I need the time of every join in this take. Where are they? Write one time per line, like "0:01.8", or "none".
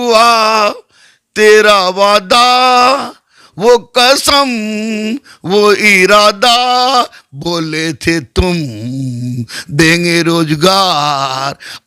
none